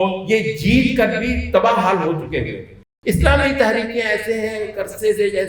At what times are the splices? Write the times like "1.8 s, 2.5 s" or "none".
2.7 s